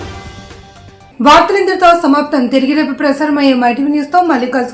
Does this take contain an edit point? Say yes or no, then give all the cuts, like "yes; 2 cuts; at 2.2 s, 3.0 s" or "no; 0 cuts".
no; 0 cuts